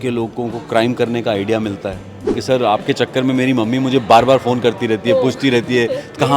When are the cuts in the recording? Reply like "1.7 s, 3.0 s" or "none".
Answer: 2.4 s